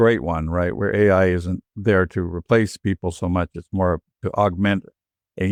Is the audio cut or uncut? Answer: uncut